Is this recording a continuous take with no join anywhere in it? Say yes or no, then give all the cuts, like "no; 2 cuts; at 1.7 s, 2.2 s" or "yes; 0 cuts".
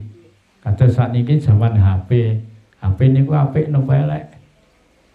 yes; 0 cuts